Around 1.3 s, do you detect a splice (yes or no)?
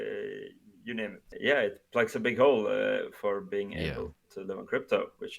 yes